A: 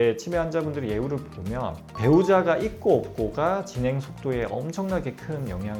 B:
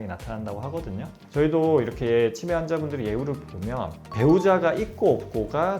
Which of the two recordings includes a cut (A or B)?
B